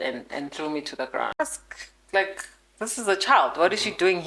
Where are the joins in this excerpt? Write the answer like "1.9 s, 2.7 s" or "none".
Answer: 1.4 s